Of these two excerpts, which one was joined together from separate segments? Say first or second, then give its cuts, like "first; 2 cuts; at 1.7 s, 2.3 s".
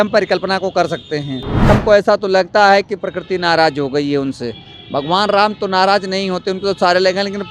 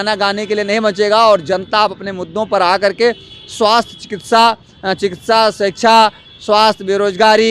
first; 1 cut; at 1.7 s